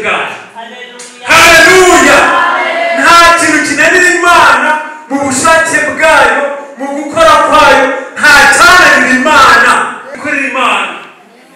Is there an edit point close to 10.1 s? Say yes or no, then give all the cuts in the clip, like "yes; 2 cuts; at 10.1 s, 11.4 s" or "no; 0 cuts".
yes; 1 cut; at 10.1 s